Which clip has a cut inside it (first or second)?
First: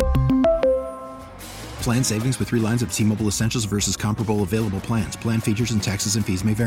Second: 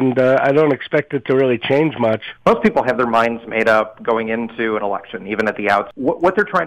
second